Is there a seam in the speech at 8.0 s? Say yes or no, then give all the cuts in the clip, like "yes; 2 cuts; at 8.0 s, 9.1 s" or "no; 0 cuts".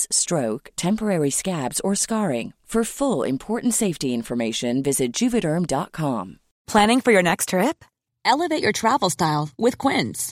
no; 1 cut; at 6.5 s